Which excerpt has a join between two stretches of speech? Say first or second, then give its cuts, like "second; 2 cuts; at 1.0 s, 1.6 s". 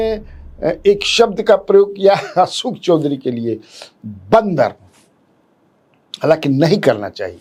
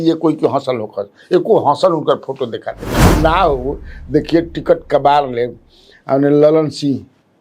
second; 1 cut; at 3.1 s